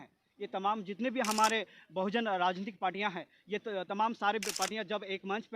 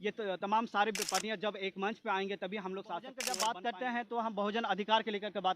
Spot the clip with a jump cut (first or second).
second